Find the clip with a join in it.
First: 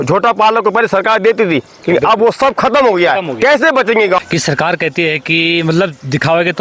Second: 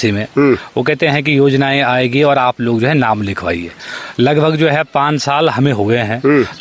first; 1 cut; at 4.2 s

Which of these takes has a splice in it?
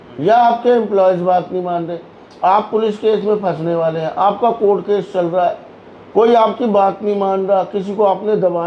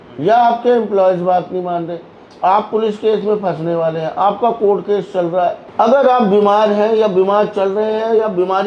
second; 1 cut; at 5.7 s

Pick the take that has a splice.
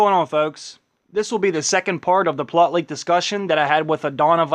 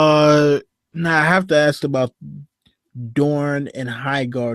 second; 1 cut; at 1.5 s

